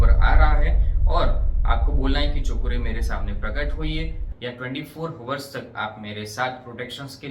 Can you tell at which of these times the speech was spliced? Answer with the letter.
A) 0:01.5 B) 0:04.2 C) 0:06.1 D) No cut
B